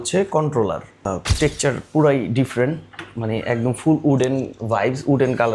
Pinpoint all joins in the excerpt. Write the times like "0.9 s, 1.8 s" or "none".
1.1 s